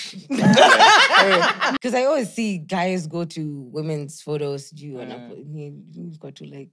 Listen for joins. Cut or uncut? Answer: cut